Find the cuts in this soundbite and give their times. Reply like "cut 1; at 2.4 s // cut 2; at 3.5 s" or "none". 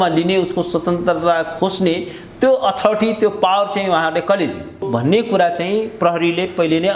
cut 1; at 4.8 s